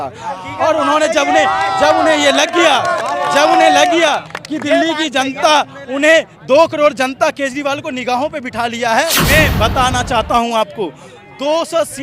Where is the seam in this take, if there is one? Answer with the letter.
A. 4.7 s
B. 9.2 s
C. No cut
B